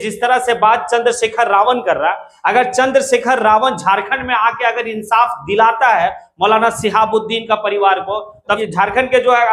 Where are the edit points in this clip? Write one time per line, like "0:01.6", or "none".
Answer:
0:08.6